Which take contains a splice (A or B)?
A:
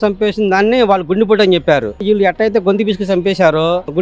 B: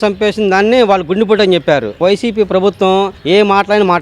B